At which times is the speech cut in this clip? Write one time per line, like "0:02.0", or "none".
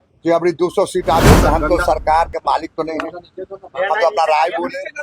0:01.4

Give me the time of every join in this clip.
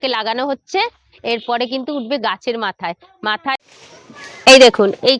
0:03.5

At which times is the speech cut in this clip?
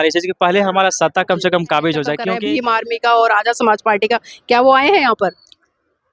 0:02.3

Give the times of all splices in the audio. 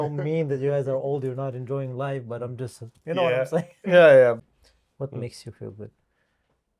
0:03.0
0:04.4

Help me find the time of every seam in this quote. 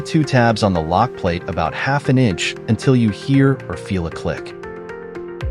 0:04.4

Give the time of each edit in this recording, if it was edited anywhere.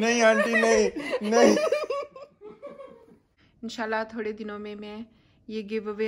0:03.4

